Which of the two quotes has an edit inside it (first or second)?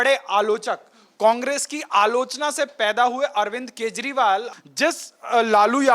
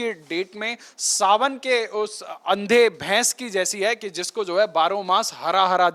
first